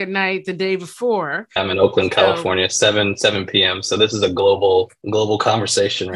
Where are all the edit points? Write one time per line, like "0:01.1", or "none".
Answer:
0:01.6
0:05.0